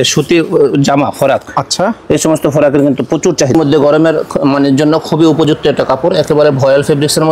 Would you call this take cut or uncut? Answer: cut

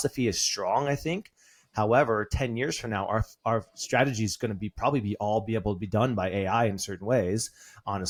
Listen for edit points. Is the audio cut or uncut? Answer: uncut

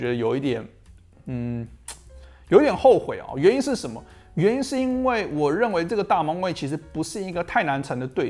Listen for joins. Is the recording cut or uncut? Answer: uncut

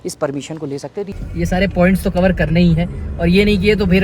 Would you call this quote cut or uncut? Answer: cut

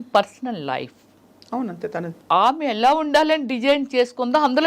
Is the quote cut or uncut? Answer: cut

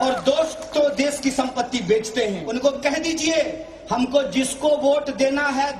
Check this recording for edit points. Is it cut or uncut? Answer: cut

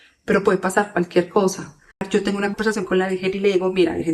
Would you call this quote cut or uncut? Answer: cut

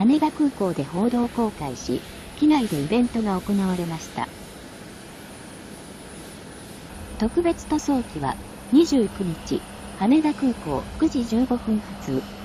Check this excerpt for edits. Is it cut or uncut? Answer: uncut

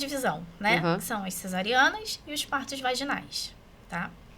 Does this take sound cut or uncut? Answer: uncut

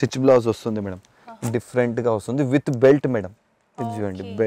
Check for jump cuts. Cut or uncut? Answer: uncut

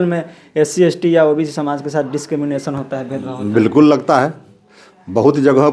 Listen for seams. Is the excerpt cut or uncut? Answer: uncut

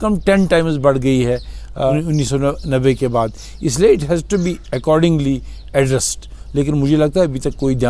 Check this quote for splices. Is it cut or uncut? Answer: uncut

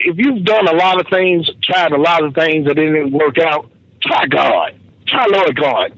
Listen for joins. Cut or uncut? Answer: uncut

